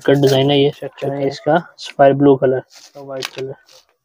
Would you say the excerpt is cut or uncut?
cut